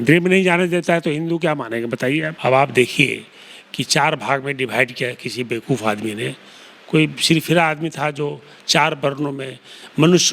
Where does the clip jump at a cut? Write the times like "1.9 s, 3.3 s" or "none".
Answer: 2.3 s